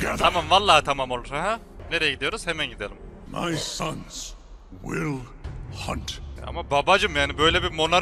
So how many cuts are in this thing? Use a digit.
3